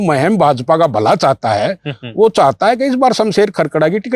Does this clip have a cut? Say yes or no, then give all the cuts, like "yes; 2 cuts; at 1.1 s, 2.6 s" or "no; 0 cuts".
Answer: no; 0 cuts